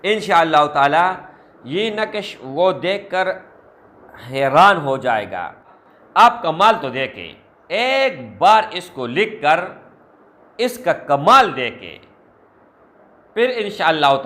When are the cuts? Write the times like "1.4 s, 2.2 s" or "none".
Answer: 5.7 s